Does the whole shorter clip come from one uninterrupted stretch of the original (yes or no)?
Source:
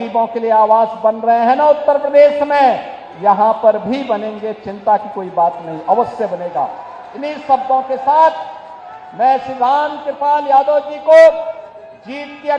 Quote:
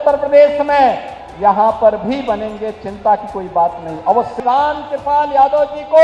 no